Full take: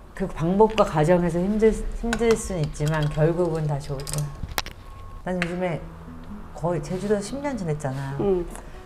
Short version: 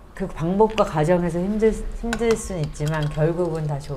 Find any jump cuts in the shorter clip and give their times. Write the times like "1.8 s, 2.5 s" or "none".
none